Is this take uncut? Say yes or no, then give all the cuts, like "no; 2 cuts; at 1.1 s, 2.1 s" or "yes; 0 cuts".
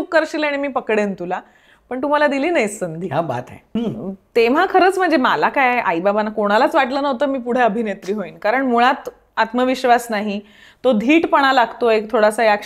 no; 1 cut; at 3.6 s